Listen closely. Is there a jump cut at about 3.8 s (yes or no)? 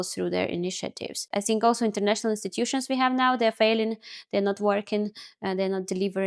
no